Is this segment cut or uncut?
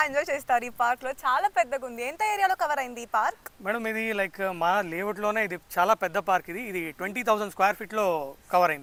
uncut